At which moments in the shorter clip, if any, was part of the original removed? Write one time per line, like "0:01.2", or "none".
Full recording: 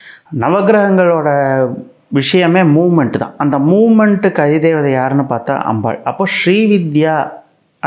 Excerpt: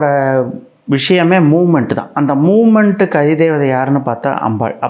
none